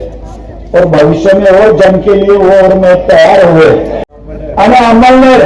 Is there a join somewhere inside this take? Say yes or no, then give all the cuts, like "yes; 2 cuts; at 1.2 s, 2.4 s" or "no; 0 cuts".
yes; 1 cut; at 4.0 s